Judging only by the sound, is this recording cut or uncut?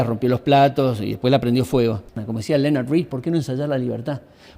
cut